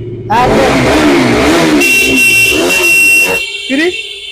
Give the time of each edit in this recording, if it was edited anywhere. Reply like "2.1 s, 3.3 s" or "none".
3.4 s